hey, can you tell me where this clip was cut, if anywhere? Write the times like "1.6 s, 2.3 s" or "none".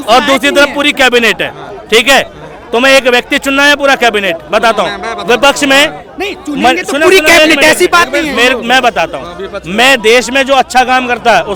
none